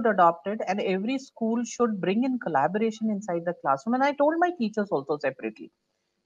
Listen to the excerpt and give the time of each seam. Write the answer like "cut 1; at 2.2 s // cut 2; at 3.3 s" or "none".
none